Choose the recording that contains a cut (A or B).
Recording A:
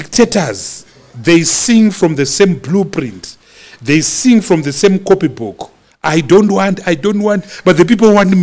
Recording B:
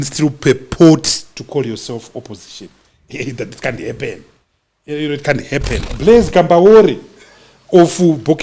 B